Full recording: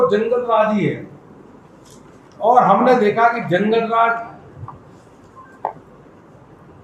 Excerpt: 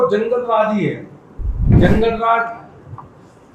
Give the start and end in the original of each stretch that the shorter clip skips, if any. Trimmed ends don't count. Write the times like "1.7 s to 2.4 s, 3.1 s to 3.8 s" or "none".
1.7 s to 3.4 s

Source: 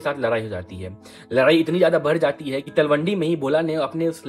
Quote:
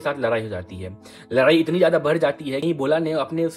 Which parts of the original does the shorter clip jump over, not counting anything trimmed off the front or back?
2.6 s to 3.3 s

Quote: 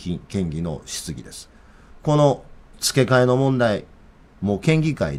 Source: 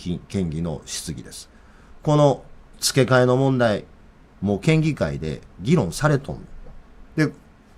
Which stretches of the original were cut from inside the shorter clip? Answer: none

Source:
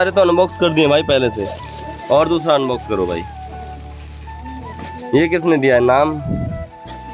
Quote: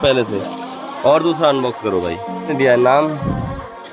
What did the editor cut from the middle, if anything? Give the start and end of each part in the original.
3.6 s to 5.6 s

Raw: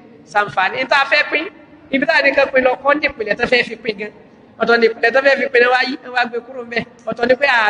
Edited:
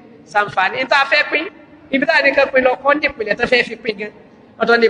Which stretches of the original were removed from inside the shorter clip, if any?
none

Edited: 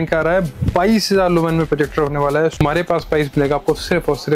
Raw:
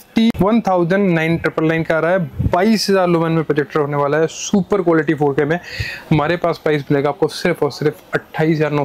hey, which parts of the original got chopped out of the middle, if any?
4.4 s to 6.2 s

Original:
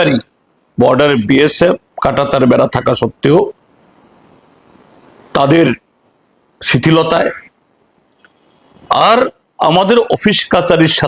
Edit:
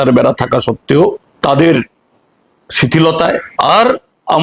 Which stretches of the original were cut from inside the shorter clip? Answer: 3.6 s to 5.2 s, 7.4 s to 8.8 s

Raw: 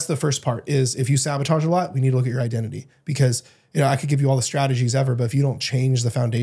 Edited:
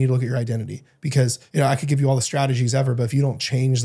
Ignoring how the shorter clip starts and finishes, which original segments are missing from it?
3.4 s to 3.6 s

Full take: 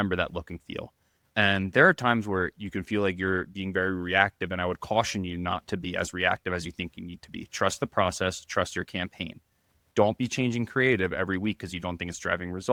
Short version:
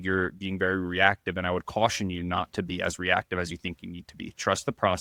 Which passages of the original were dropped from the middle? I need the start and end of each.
none

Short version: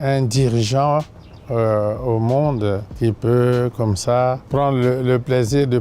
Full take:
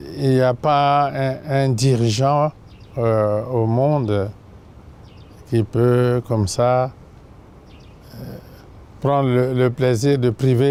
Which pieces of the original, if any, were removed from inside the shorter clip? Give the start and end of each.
4.4 s to 5.4 s, 6.9 s to 8.9 s

